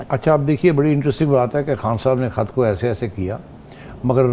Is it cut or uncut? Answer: uncut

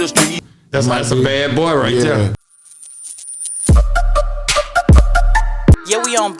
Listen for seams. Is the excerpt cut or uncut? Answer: cut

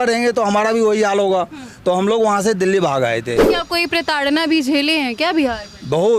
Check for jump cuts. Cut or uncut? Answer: cut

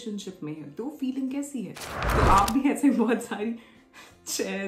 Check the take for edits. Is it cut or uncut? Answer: cut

